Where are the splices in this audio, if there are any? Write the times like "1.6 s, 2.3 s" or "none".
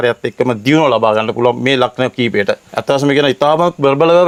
none

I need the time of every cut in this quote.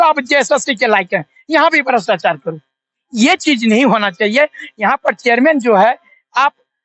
none

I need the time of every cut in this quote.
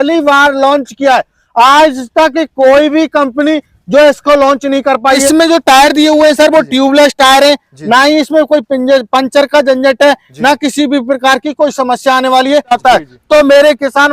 5.3 s, 12.7 s

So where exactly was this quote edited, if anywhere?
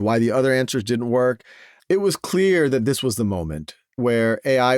1.8 s

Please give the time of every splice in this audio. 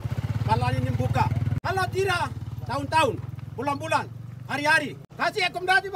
1.6 s, 5.0 s

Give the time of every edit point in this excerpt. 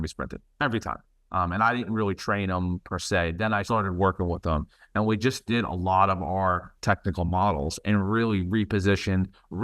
3.6 s

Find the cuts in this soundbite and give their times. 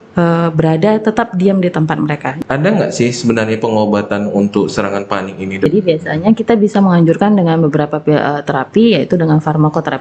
2.3 s, 5.7 s

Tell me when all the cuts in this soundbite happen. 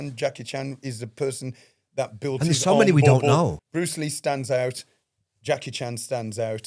3.6 s

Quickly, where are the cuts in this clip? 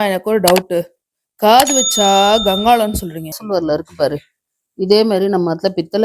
3.4 s

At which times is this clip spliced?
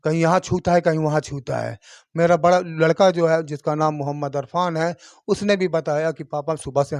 none

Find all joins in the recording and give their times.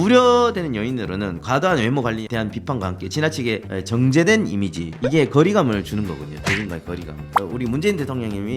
none

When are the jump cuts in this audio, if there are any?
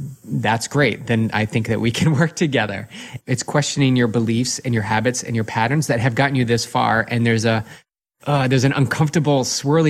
3.2 s, 8.1 s

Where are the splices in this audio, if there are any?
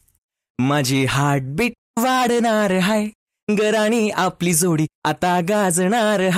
none

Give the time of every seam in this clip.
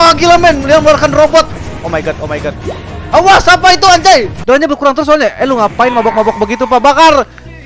4.4 s

